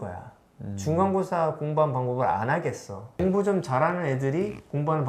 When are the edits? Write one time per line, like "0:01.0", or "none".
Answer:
none